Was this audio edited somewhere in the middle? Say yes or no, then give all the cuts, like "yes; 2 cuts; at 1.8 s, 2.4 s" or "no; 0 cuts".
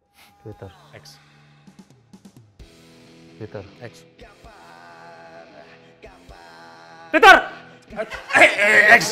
no; 0 cuts